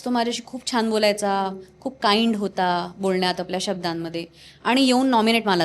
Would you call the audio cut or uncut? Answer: uncut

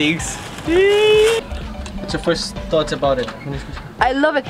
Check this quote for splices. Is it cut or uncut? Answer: cut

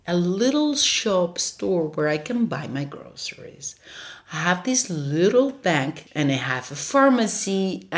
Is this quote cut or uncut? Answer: cut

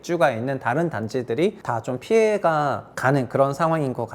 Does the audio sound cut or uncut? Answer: cut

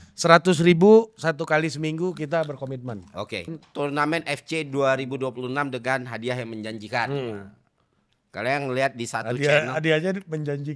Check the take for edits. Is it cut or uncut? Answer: cut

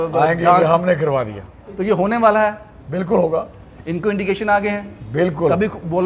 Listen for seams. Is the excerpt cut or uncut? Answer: uncut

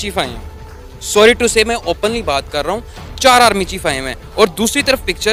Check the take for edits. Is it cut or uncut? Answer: uncut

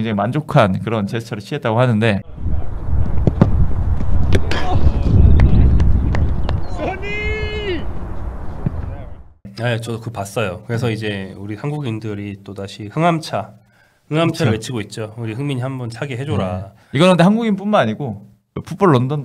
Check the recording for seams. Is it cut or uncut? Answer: uncut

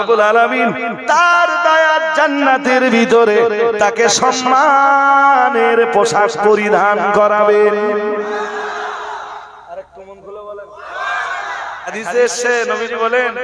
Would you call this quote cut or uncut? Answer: cut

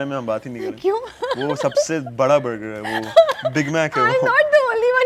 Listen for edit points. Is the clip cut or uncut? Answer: uncut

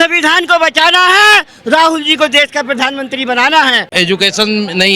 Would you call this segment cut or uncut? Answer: cut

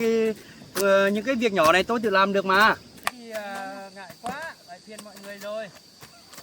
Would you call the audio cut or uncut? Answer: cut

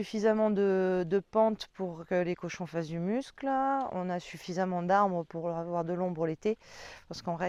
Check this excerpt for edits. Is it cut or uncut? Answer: uncut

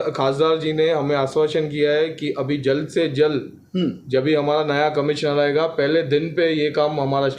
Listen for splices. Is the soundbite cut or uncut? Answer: uncut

